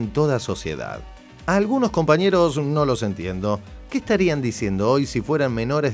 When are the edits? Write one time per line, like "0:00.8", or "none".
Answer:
none